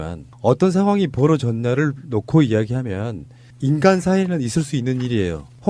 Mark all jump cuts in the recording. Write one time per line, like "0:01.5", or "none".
0:04.1